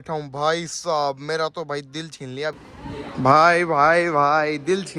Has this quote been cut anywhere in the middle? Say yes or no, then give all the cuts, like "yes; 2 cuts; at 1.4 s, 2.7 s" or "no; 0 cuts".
yes; 1 cut; at 2.5 s